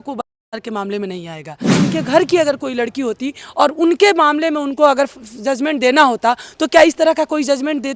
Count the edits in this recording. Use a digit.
1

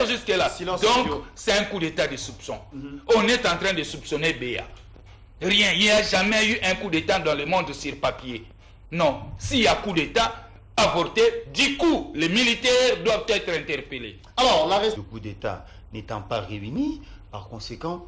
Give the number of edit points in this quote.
1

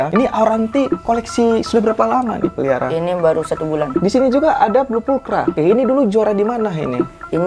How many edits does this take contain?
2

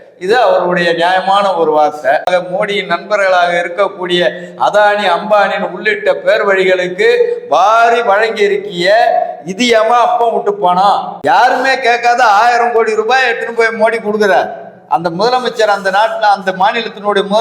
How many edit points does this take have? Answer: 2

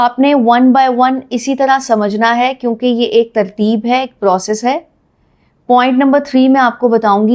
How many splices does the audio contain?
0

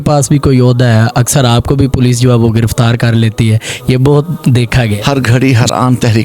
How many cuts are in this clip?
1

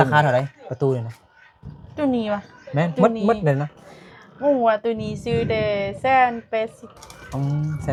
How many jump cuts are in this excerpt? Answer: 0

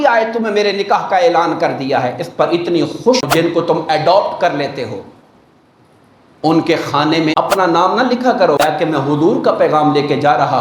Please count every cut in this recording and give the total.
3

